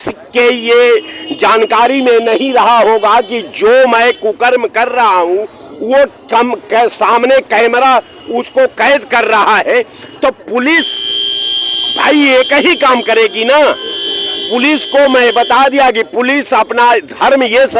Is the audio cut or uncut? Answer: uncut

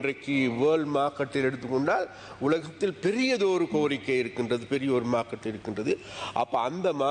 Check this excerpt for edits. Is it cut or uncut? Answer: uncut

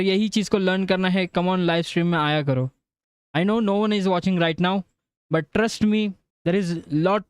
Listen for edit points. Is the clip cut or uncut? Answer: cut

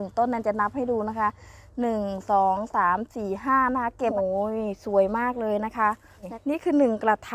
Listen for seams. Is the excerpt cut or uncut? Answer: cut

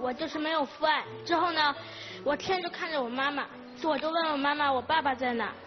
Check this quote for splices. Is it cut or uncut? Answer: uncut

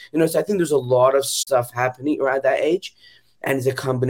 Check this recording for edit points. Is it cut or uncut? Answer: cut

